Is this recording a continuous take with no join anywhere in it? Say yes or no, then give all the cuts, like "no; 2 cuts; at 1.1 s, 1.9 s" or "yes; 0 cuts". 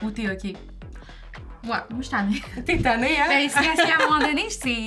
yes; 0 cuts